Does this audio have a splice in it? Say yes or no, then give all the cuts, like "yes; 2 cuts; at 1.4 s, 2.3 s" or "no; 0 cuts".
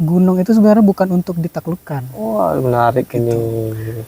no; 0 cuts